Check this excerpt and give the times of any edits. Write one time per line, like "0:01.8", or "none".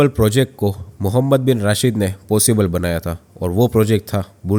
none